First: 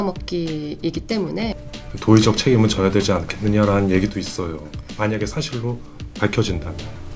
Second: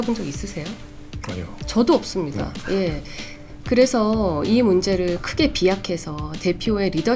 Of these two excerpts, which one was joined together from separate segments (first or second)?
first